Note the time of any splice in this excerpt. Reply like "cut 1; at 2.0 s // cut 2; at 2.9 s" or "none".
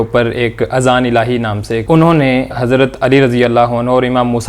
cut 1; at 1.8 s // cut 2; at 2.5 s